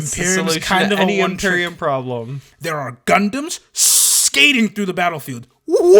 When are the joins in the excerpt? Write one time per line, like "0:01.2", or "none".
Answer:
0:02.5